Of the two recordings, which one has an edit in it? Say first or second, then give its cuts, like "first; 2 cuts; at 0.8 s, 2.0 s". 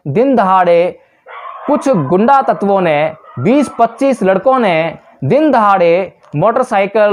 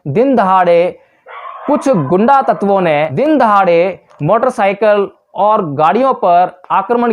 second; 1 cut; at 3.1 s